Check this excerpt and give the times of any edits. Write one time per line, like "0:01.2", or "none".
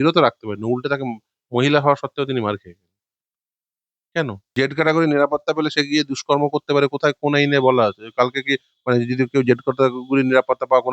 0:04.5